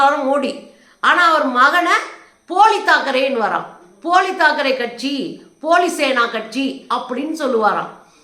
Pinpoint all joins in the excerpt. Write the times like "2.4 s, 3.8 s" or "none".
none